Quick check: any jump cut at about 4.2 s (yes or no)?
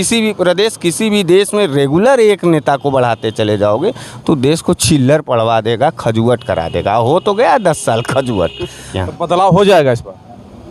no